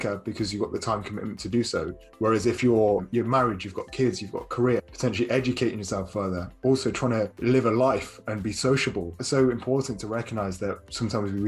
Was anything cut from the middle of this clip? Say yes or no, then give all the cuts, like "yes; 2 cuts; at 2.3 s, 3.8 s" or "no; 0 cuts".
yes; 4 cuts; at 3.1 s, 4.9 s, 7.3 s, 9.2 s